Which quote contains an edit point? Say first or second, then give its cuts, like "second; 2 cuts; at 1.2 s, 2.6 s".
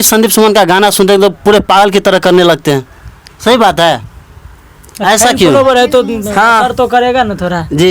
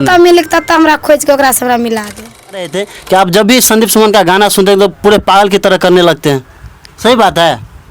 second; 1 cut; at 2.6 s